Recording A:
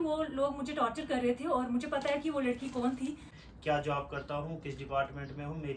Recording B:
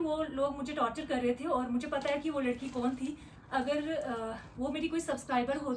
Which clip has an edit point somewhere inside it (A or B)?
A